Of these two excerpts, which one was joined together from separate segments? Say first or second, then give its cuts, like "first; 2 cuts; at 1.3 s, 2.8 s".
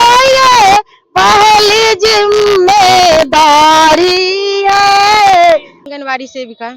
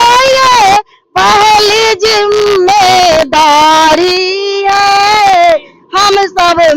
first; 1 cut; at 5.8 s